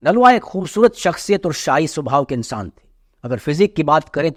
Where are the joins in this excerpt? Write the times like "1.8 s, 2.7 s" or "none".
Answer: none